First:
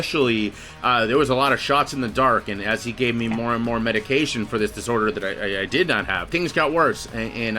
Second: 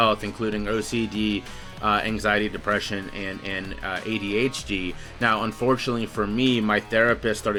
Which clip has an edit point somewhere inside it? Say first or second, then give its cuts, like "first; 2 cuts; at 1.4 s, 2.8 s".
first; 1 cut; at 6.3 s